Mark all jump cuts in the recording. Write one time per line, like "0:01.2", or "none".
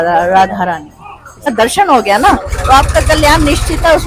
0:01.5